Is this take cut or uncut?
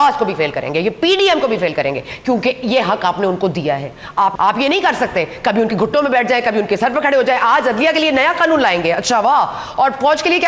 cut